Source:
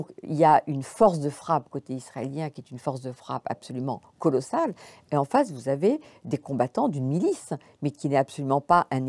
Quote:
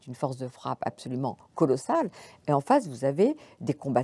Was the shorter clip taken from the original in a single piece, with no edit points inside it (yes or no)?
yes